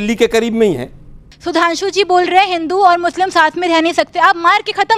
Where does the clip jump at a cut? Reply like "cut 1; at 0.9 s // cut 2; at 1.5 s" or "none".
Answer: cut 1; at 1.3 s